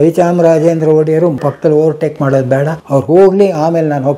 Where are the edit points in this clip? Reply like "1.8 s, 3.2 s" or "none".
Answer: 1.4 s, 2.8 s